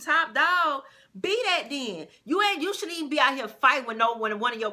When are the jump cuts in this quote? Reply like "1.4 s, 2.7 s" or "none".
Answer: none